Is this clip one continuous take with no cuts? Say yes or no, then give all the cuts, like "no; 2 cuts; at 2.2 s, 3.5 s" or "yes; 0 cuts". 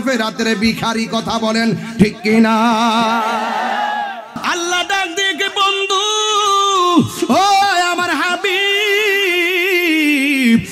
no; 1 cut; at 4.3 s